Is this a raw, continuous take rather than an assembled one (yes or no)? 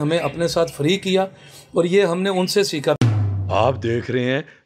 no